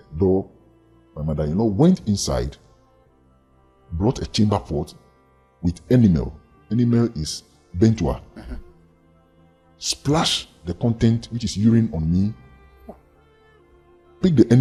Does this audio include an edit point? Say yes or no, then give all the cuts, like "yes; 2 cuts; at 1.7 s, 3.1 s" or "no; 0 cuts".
no; 0 cuts